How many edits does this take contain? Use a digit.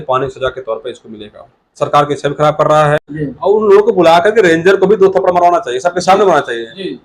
1